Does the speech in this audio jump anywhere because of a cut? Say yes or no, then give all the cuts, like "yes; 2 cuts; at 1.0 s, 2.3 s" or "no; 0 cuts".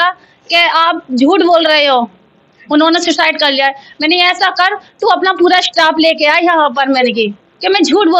no; 0 cuts